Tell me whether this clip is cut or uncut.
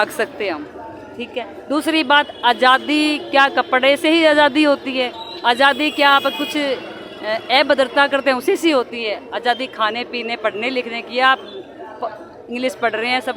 uncut